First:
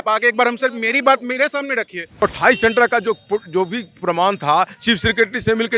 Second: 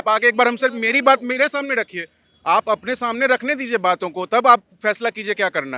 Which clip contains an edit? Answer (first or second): first